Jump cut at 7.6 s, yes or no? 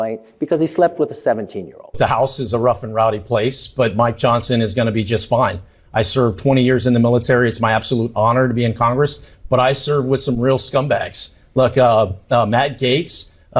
no